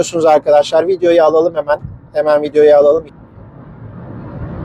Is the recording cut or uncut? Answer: uncut